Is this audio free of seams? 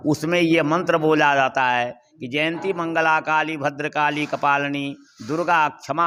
yes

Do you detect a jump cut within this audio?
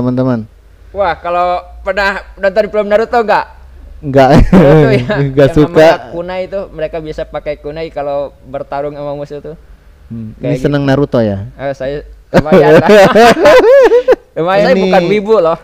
yes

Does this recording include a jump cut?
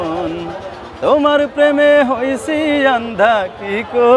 no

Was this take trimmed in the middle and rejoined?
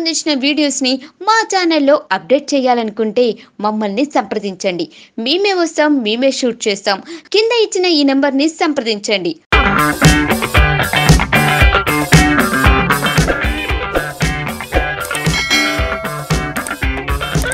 no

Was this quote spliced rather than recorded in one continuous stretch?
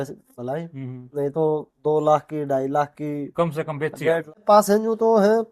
yes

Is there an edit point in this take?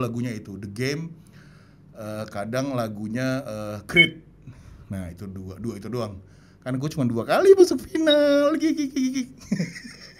no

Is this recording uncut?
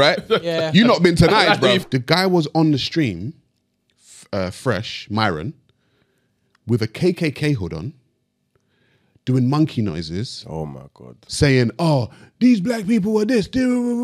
no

